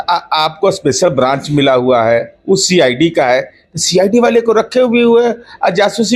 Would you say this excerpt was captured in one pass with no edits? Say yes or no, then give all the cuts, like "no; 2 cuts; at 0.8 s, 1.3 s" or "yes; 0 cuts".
yes; 0 cuts